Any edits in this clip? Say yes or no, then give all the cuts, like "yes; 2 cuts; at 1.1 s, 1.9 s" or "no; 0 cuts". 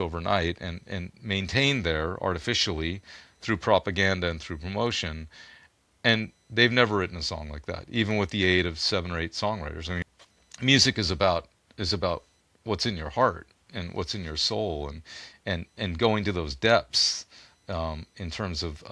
yes; 1 cut; at 10.0 s